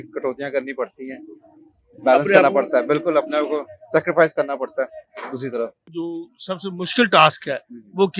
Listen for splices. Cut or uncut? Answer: cut